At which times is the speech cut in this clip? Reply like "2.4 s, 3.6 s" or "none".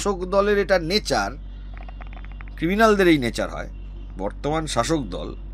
none

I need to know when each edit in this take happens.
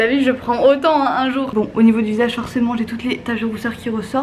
none

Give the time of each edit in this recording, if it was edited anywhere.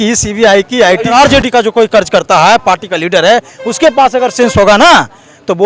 1.1 s

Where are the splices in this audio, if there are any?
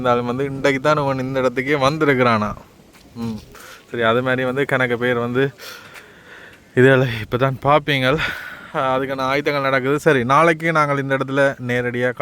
none

